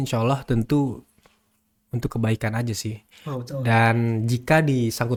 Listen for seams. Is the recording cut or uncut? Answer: uncut